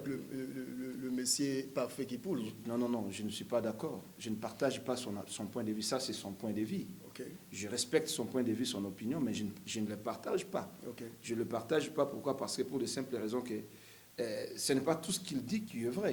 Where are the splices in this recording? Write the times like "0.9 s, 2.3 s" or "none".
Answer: none